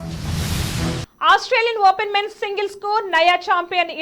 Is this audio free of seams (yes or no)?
no